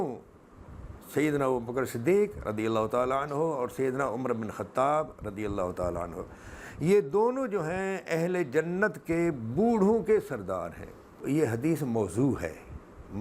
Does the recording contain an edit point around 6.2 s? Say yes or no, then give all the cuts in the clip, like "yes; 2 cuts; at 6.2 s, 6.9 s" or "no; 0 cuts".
no; 1 cut; at 11.2 s